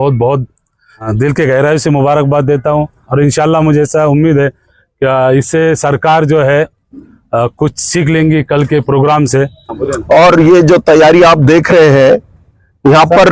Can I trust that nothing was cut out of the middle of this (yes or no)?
no